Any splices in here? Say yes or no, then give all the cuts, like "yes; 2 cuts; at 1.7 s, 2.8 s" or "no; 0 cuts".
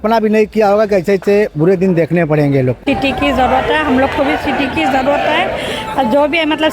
yes; 1 cut; at 2.8 s